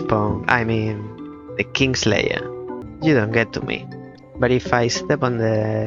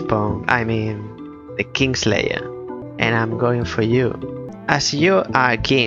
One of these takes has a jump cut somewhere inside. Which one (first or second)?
first